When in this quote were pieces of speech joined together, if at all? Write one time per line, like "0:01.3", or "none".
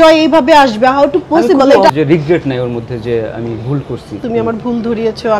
0:01.9
0:04.2